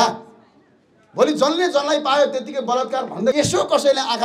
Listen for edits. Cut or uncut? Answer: cut